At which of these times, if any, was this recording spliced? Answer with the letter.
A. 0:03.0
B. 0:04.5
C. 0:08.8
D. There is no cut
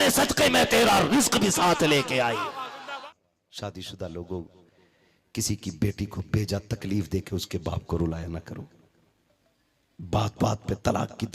A